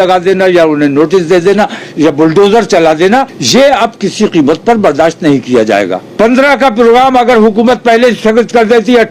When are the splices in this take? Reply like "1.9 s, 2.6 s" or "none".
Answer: 3.4 s, 6.0 s

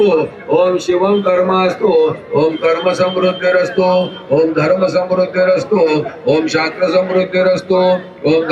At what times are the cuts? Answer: none

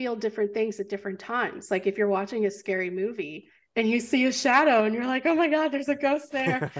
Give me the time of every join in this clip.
none

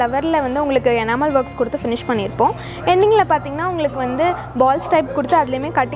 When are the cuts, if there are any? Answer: none

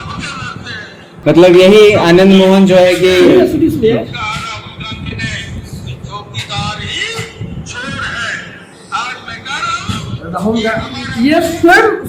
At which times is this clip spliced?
1.2 s

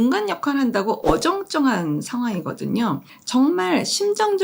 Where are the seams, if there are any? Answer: 3.1 s

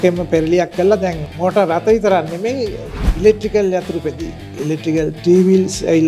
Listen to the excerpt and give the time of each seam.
4.4 s

